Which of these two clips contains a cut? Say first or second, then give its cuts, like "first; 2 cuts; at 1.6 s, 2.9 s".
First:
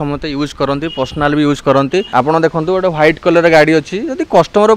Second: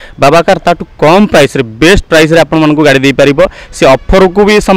first; 1 cut; at 2.1 s